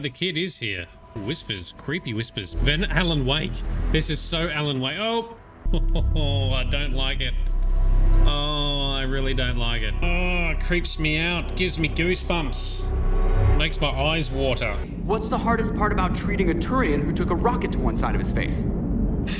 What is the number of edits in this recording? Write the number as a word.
four